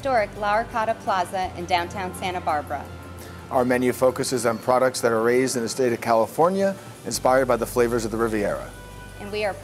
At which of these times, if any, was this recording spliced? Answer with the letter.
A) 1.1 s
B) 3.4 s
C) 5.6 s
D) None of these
D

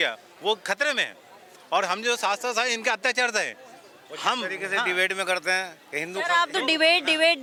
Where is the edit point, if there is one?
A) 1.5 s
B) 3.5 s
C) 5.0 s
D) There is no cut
D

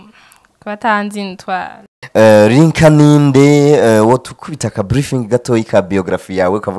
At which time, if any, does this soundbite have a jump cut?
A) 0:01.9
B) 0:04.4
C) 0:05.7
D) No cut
A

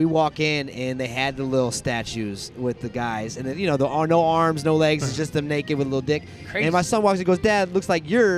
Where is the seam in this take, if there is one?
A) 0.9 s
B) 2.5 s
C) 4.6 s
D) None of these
D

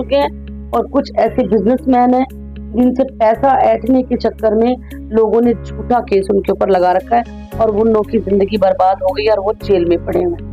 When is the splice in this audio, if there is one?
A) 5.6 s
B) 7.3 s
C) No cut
C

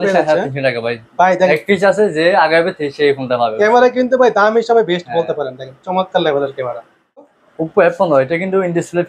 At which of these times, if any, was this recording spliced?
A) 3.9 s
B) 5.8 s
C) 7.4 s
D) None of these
C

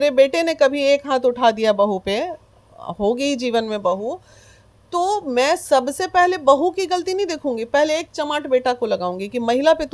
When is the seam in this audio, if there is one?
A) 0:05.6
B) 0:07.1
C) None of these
C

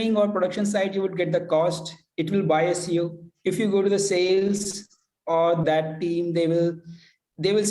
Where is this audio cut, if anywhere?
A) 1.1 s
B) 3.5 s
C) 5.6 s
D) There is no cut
C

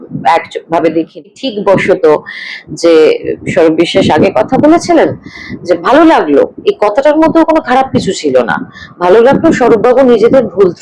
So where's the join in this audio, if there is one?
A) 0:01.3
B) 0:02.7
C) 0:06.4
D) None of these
A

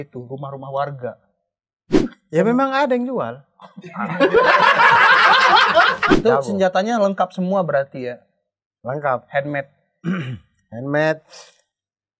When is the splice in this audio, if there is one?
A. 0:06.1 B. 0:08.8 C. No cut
A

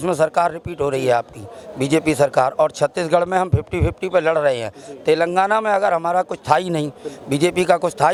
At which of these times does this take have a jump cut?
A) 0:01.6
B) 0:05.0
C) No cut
C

